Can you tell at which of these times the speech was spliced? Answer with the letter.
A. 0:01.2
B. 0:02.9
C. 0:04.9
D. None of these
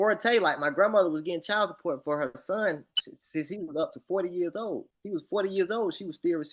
C